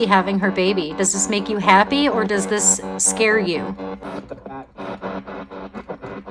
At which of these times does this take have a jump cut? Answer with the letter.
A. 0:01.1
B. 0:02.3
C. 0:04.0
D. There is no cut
C